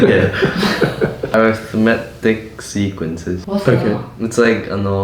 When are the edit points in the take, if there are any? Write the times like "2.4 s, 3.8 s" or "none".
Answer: 1.3 s, 3.4 s